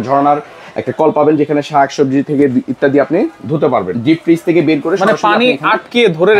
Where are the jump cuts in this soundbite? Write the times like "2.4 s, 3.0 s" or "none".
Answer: 3.9 s